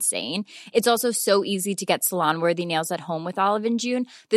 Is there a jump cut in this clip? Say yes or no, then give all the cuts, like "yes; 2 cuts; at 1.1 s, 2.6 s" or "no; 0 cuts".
no; 0 cuts